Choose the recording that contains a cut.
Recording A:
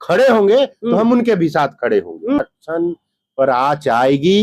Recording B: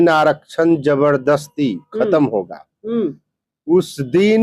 A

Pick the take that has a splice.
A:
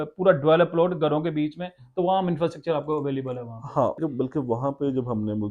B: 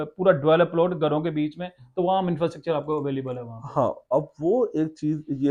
A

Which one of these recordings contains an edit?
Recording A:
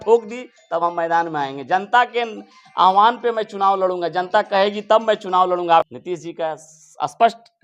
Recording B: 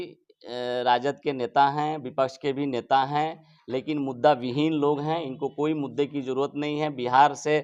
A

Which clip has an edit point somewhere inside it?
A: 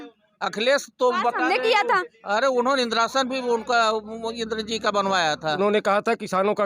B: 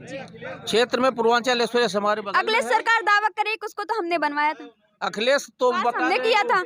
A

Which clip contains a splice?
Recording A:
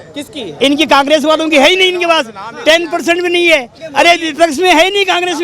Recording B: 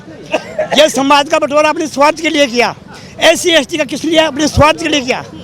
A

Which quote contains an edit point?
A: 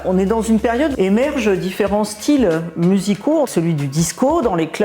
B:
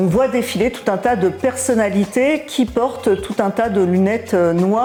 A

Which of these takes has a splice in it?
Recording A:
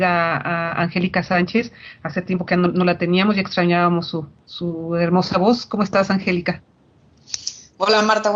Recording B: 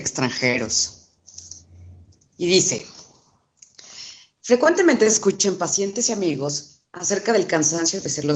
B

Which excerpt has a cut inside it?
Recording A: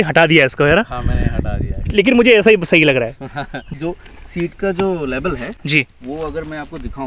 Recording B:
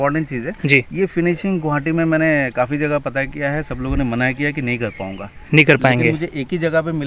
A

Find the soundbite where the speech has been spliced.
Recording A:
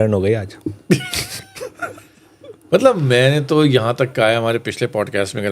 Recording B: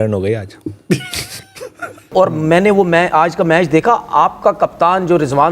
B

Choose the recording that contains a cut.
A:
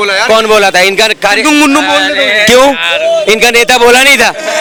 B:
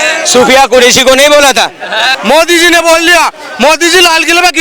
B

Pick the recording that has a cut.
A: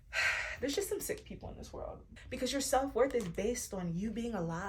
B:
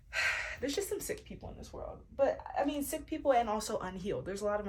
A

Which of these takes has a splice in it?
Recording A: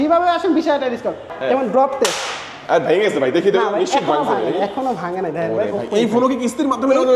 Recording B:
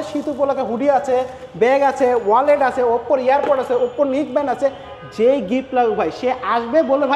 A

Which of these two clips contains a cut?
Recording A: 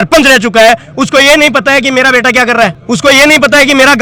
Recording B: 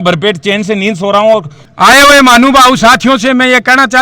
B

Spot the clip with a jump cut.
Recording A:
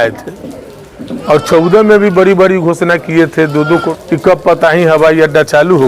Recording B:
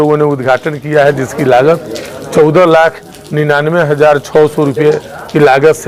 A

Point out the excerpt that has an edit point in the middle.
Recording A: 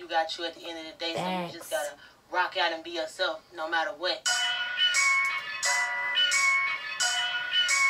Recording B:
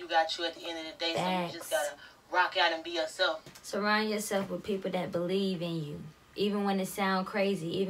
B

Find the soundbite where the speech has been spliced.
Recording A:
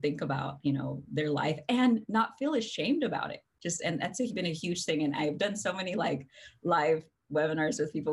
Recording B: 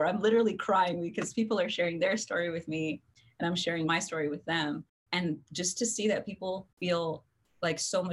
B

